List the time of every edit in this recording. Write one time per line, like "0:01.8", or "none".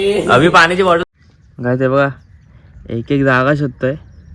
0:01.0